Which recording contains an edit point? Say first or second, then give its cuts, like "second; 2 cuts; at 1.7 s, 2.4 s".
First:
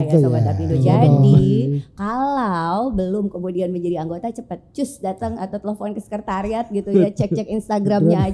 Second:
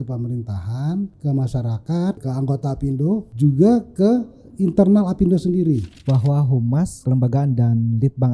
second; 5 cuts; at 1.2 s, 2.2 s, 3.3 s, 5.9 s, 7.0 s